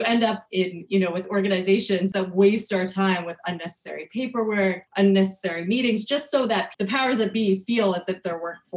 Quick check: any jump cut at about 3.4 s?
no; 3 cuts; at 2.1 s, 4.8 s, 6.7 s

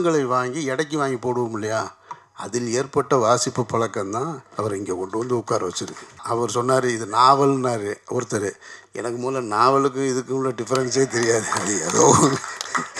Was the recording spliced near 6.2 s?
yes; 1 cut; at 6.2 s

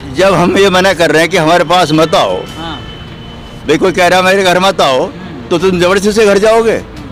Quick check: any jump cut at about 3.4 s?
no; 0 cuts

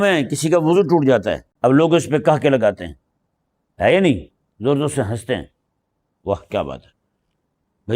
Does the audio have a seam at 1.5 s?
yes; 1 cut; at 1.5 s

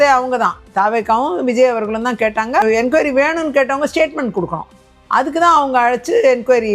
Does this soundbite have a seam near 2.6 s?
yes; 1 cut; at 2.6 s

